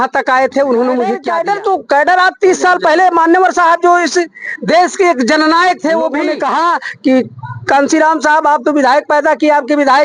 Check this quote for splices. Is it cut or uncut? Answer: cut